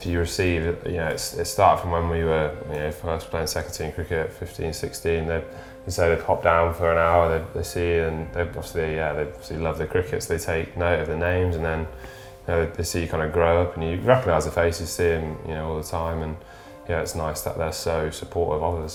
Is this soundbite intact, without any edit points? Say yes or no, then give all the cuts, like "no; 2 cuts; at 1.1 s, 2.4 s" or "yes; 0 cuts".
yes; 0 cuts